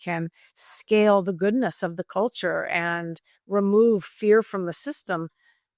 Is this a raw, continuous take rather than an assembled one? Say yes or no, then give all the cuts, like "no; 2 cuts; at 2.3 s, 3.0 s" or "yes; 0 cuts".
yes; 0 cuts